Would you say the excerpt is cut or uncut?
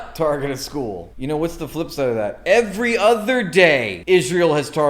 cut